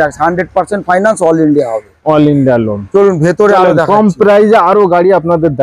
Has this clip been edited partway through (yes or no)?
no